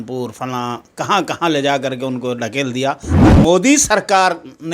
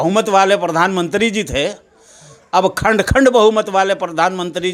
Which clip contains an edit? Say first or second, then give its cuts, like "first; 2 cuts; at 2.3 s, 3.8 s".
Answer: first; 1 cut; at 3.1 s